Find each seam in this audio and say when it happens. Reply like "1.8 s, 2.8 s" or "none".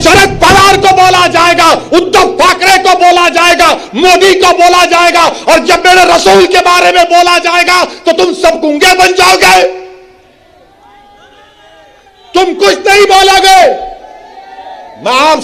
none